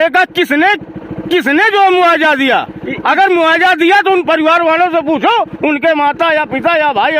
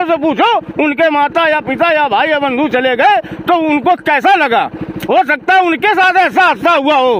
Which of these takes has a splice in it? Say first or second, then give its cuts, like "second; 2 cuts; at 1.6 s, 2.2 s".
second; 1 cut; at 4.9 s